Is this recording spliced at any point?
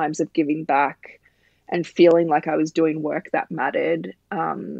no; 0 cuts

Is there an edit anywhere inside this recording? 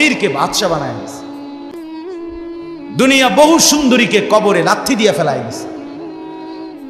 yes; 2 cuts; at 1.0 s, 2.6 s

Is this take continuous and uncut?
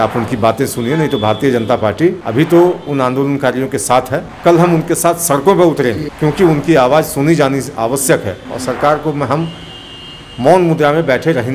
no; 3 cuts; at 2.2 s, 4.3 s, 6.1 s

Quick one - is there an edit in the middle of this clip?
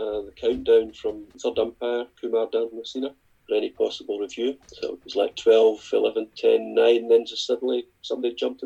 yes; 3 cuts; at 1.3 s, 3.3 s, 4.7 s

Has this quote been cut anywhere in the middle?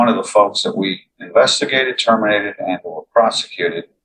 no; 0 cuts

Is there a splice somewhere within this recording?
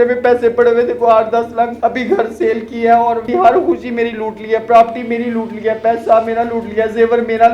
yes; 2 cuts; at 1.7 s, 3.3 s

